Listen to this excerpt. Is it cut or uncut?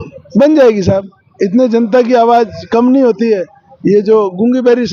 uncut